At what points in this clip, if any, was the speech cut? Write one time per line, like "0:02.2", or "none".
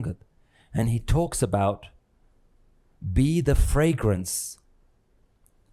none

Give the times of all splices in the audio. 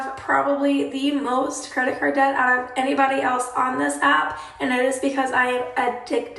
none

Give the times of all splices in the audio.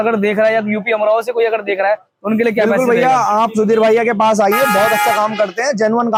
none

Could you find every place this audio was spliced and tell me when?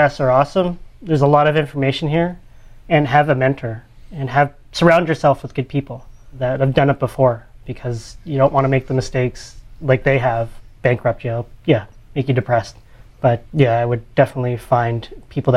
none

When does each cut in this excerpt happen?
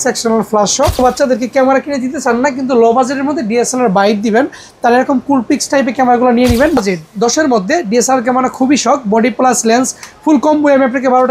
0:01.0
0:06.8

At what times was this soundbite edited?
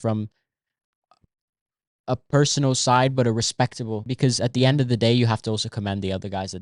0:04.1

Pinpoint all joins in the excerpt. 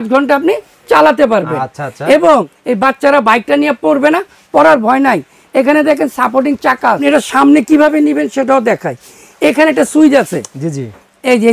0:02.6
0:07.0

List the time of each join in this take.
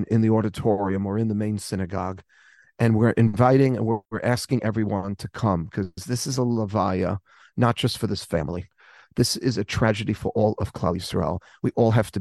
0:04.1

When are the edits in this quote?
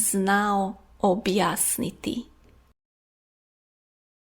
none

